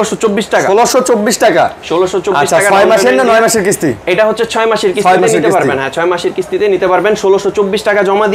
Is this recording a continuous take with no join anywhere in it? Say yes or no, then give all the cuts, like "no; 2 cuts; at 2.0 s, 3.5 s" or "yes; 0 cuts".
yes; 0 cuts